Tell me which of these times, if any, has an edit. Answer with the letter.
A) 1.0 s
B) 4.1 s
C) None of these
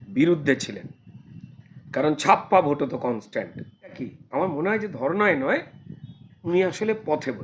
B